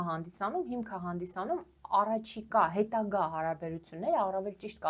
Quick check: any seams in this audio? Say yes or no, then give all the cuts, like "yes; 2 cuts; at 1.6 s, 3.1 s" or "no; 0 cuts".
no; 0 cuts